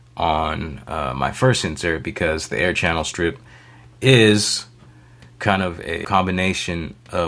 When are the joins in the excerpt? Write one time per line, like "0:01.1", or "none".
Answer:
0:06.0